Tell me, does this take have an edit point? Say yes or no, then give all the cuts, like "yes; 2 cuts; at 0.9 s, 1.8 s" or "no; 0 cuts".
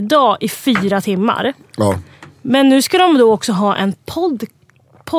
no; 0 cuts